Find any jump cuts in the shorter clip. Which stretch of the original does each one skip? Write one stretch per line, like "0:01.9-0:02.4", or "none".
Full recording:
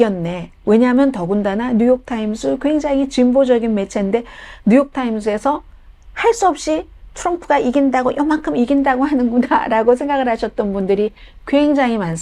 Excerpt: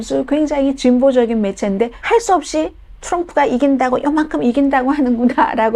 0:04.3-0:06.1